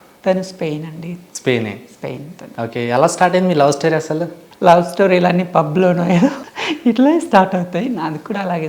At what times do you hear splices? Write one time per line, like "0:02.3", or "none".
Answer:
0:04.4
0:06.5